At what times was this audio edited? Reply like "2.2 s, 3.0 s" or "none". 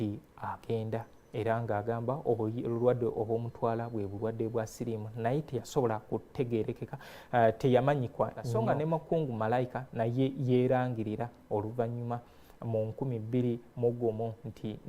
8.4 s